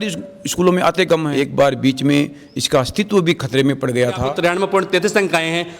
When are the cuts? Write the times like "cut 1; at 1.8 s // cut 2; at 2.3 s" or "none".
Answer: cut 1; at 1.3 s // cut 2; at 4.3 s